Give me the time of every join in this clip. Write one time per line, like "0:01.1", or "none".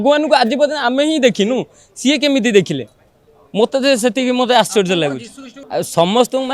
0:05.6